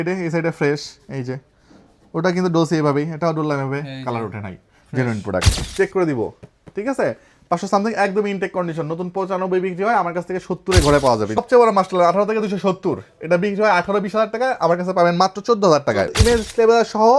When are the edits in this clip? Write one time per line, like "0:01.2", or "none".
0:05.5
0:11.4
0:16.2